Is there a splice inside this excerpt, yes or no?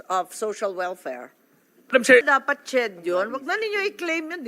yes